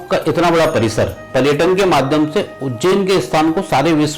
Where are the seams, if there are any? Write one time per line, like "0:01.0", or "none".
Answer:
0:01.2